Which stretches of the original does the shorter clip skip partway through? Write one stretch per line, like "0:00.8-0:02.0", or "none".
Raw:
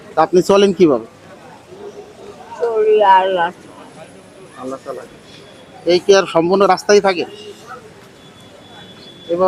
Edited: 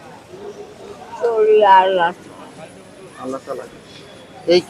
none